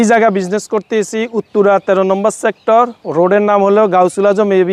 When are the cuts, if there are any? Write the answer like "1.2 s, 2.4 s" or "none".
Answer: none